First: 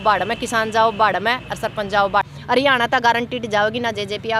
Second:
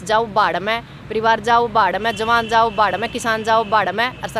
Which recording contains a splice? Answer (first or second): first